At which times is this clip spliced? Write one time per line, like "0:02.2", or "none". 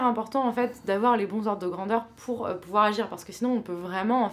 none